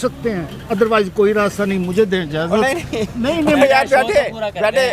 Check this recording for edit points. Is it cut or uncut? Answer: uncut